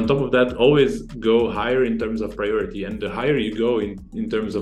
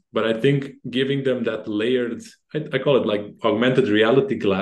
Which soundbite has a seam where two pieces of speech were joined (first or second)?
second